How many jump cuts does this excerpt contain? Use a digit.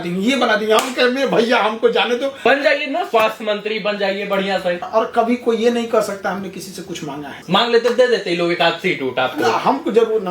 3